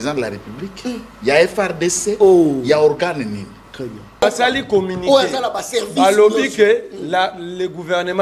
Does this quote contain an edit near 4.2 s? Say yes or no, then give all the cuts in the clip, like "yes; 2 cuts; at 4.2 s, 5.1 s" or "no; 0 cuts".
yes; 1 cut; at 4.2 s